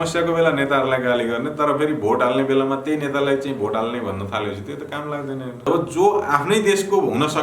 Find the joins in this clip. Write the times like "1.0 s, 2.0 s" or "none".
5.6 s